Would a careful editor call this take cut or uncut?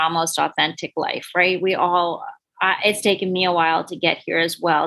uncut